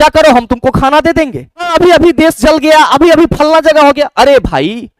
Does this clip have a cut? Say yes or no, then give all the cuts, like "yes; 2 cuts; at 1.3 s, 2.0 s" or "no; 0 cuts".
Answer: yes; 1 cut; at 1.7 s